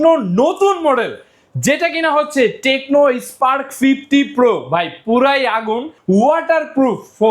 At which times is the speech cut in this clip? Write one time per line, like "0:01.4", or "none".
0:05.9